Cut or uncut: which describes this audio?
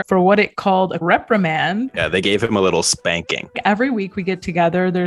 cut